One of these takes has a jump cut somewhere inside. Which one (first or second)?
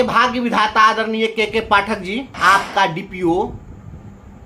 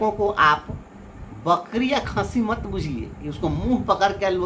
first